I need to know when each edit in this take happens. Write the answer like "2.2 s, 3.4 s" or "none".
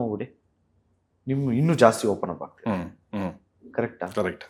none